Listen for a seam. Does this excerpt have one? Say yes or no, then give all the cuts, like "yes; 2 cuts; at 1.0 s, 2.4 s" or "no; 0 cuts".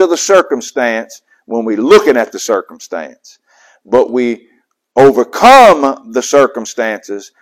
no; 0 cuts